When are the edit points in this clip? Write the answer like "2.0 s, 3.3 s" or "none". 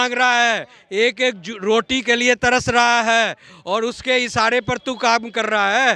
none